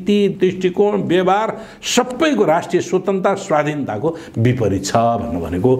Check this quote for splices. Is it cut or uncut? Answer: uncut